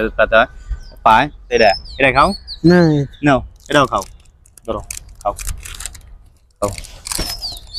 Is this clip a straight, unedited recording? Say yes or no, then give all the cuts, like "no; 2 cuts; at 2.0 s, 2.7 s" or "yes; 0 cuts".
no; 1 cut; at 1.5 s